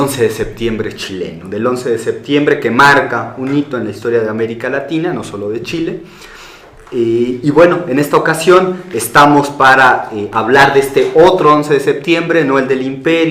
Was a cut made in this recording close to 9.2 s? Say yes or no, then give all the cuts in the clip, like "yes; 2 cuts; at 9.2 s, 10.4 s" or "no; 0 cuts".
yes; 1 cut; at 9.2 s